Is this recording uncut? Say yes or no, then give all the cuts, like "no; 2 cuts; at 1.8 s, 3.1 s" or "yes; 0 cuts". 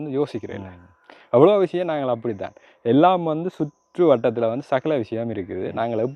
yes; 0 cuts